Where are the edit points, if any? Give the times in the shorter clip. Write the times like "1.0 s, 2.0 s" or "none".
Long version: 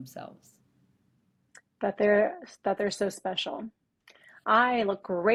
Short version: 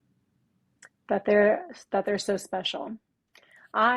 none